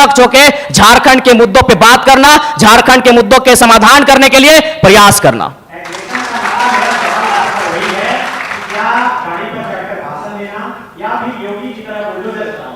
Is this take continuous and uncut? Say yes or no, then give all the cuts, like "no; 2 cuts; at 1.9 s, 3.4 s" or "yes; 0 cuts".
yes; 0 cuts